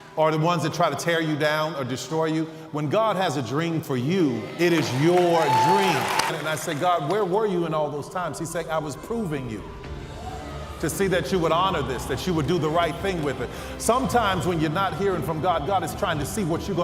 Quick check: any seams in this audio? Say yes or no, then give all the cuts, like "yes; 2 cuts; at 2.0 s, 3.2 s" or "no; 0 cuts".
yes; 1 cut; at 6.3 s